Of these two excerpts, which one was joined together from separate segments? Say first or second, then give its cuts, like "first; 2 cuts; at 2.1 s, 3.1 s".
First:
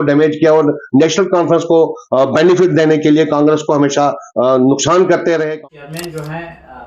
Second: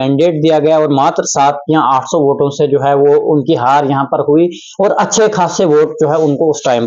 first; 1 cut; at 5.5 s